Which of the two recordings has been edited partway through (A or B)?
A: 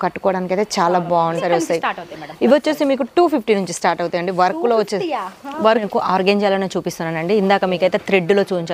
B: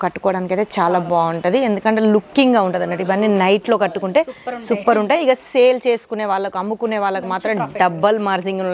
A